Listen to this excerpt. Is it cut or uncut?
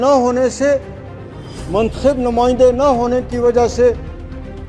uncut